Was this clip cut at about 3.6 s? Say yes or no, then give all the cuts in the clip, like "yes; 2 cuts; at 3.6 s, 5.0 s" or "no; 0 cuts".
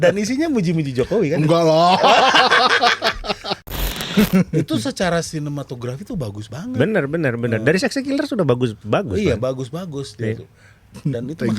yes; 1 cut; at 3.6 s